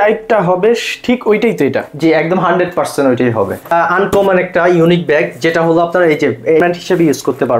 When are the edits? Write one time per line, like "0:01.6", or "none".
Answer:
0:03.7
0:06.6